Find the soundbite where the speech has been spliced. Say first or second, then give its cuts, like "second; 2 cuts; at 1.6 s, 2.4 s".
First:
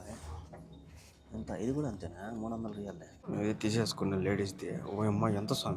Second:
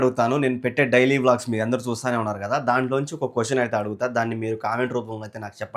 first; 1 cut; at 3.1 s